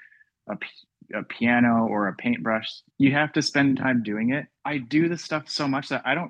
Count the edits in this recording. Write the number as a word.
two